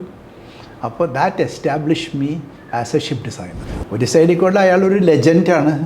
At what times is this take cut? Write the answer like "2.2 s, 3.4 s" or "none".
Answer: 3.5 s